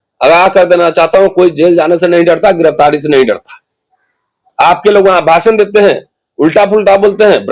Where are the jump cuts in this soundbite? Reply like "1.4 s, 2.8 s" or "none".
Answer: none